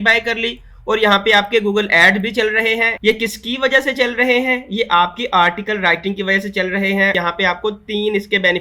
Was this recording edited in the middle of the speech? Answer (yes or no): yes